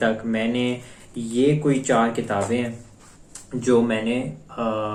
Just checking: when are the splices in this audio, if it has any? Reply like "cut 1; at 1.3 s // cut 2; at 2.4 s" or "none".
none